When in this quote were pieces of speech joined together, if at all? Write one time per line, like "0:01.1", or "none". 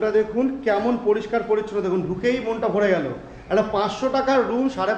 none